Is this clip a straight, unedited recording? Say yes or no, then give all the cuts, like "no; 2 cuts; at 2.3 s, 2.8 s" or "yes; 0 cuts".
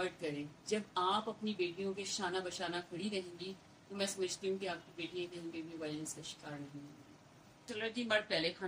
no; 1 cut; at 7.6 s